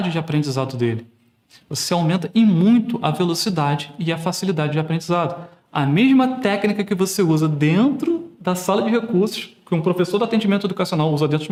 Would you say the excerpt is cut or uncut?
uncut